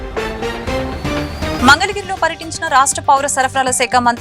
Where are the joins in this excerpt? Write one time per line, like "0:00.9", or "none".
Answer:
0:01.5